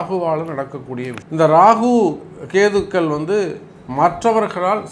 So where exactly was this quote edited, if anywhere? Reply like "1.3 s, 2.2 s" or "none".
1.2 s

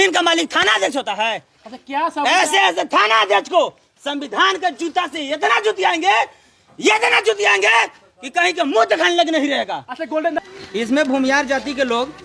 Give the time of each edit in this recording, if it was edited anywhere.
10.4 s

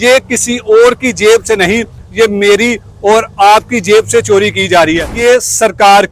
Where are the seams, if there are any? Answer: 5.1 s

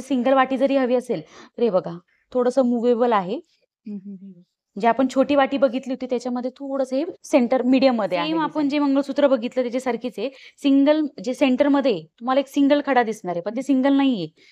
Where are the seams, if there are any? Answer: 8.4 s

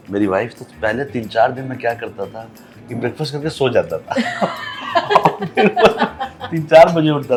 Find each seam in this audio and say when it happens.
none

